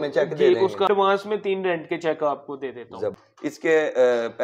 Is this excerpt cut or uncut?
cut